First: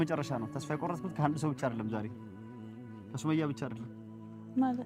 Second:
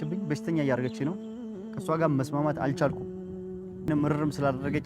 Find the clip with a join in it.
second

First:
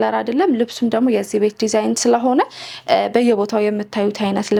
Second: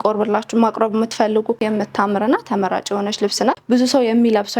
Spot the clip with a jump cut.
second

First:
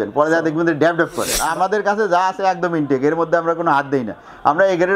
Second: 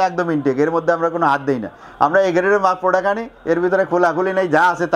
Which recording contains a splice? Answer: first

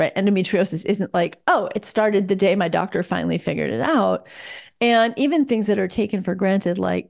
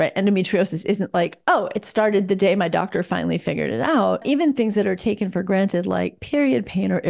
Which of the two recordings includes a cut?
second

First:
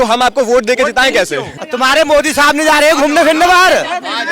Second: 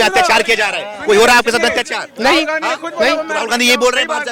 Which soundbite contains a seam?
first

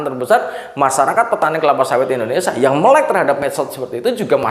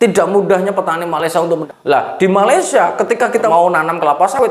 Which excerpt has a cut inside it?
second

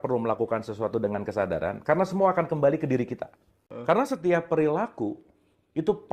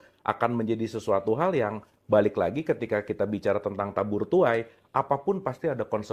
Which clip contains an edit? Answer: first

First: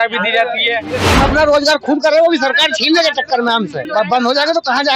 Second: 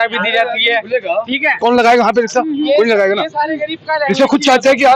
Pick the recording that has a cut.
first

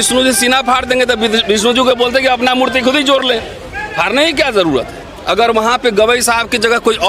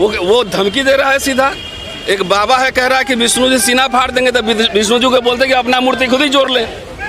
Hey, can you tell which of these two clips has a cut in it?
first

